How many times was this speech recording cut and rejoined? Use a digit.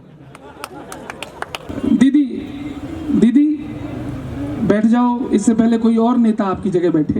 1